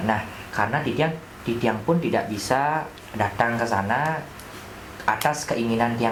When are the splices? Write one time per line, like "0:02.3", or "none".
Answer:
none